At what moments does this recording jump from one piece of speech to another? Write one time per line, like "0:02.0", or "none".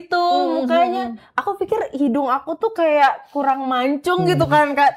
none